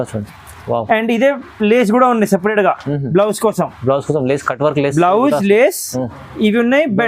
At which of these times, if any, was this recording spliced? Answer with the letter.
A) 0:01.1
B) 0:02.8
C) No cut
C